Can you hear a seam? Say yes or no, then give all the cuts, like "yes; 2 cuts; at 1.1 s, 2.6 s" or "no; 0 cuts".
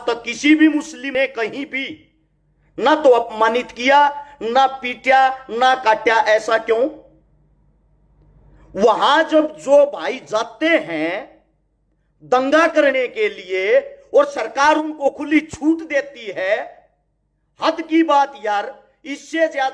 yes; 1 cut; at 1.1 s